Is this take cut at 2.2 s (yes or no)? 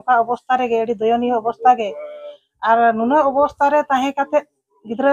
no